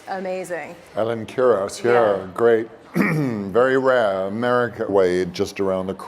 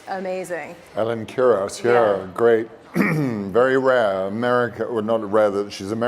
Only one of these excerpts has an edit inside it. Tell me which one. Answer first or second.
second